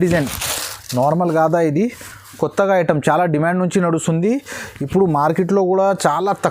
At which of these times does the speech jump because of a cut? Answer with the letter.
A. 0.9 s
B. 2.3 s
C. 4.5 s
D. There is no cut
D